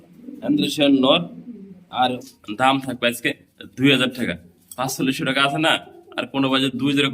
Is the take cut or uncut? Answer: cut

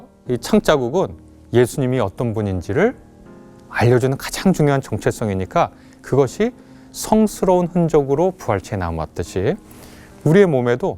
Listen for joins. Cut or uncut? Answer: uncut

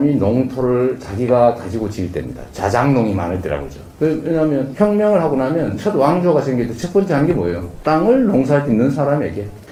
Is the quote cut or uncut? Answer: uncut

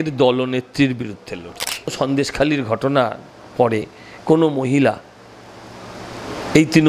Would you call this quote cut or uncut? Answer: cut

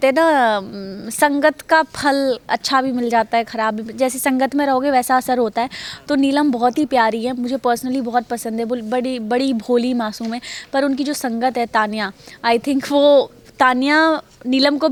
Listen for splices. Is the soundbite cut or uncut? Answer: uncut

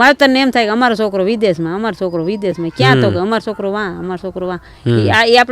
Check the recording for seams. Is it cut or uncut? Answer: uncut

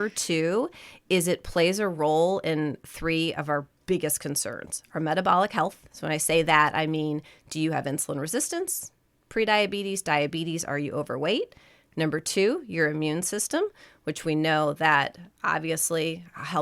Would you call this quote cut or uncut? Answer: uncut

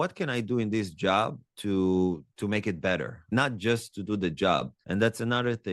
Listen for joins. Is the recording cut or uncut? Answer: cut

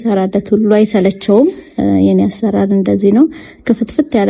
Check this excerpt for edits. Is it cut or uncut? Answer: cut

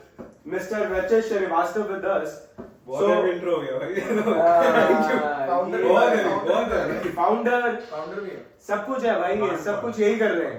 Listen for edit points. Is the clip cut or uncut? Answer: uncut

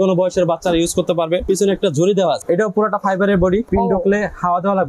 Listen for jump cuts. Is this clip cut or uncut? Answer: cut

